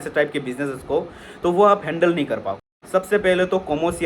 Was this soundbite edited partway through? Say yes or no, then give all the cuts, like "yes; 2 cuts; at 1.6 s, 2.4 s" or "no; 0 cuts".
yes; 1 cut; at 2.7 s